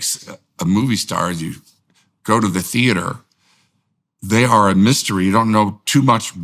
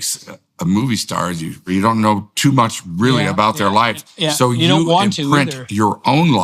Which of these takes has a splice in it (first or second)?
second